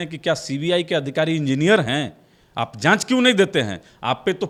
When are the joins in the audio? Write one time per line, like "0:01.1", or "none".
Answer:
none